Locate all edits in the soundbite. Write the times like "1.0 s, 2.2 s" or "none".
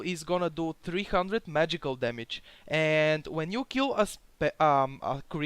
3.2 s